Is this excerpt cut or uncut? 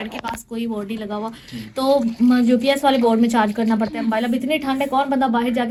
uncut